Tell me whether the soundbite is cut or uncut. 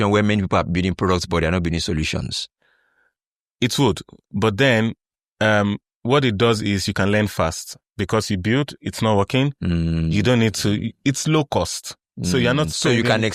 uncut